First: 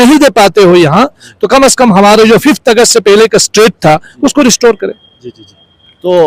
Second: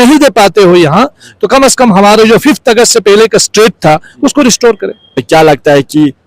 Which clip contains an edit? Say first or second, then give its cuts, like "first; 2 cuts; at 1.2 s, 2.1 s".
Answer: second; 1 cut; at 5.2 s